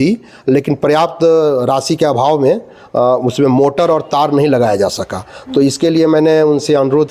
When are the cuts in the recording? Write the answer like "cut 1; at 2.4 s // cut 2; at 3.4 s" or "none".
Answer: none

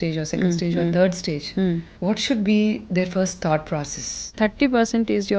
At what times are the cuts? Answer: cut 1; at 1.9 s // cut 2; at 4.3 s

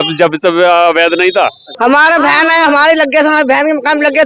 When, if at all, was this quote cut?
cut 1; at 1.6 s

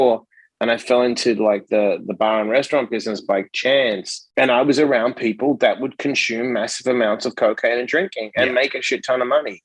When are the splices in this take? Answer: cut 1; at 4.1 s

